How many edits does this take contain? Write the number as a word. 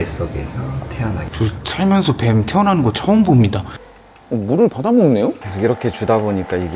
three